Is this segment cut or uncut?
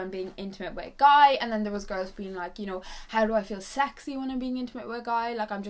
uncut